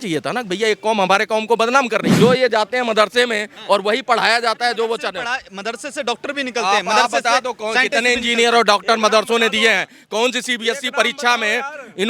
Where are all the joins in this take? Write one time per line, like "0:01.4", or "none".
0:02.1